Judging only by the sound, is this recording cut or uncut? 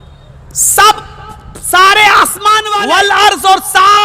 cut